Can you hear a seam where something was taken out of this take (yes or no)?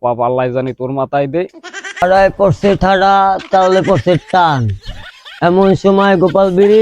yes